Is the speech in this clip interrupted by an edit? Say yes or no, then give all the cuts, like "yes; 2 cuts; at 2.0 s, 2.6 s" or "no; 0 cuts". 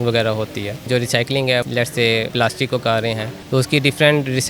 yes; 3 cuts; at 0.9 s, 2.2 s, 3.3 s